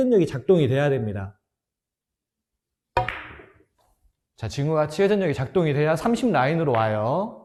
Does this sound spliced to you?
no; 0 cuts

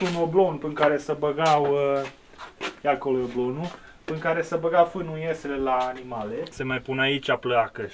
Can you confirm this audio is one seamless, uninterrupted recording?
no; 1 cut; at 6.5 s

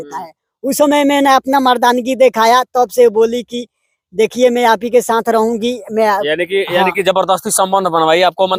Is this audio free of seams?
yes; 0 cuts

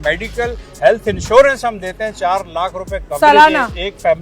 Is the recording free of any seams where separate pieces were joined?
yes; 0 cuts

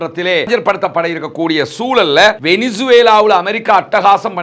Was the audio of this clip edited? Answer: yes; 1 cut; at 2.4 s

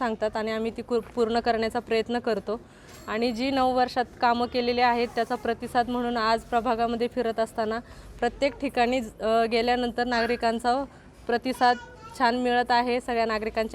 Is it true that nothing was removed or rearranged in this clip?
yes; 0 cuts

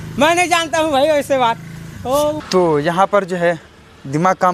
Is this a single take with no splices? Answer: no; 1 cut; at 2.4 s

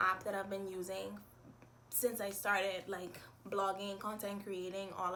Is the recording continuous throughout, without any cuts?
yes; 0 cuts

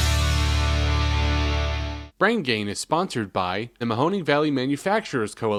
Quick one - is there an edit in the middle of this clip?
no; 0 cuts

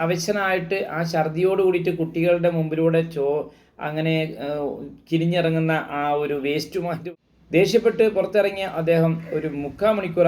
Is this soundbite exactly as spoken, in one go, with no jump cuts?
no; 1 cut; at 7.0 s

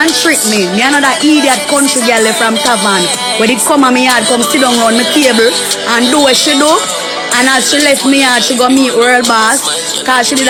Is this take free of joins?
yes; 0 cuts

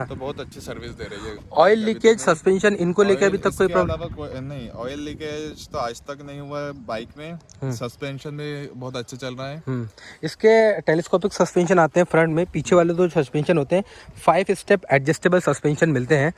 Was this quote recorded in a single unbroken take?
yes; 0 cuts

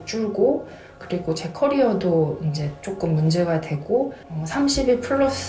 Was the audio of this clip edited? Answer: yes; 1 cut; at 4.3 s

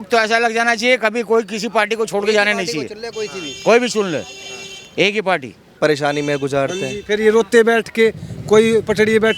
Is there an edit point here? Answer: yes; 1 cut; at 5.6 s

